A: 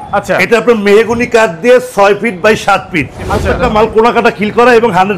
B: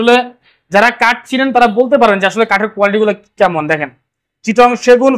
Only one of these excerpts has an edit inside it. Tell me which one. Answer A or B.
A